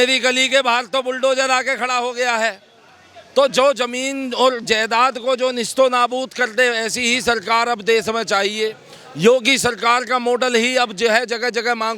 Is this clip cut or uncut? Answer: uncut